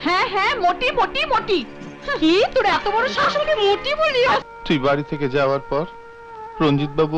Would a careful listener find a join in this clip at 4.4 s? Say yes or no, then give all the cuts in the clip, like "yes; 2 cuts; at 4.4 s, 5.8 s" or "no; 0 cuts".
yes; 1 cut; at 4.4 s